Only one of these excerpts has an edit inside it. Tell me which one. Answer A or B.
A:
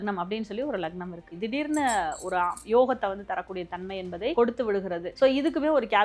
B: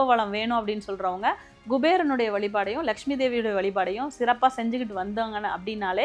A